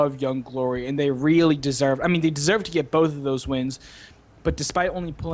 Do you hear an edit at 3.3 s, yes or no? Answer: no